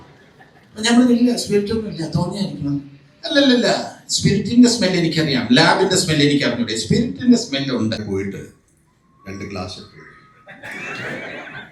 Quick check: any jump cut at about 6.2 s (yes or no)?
no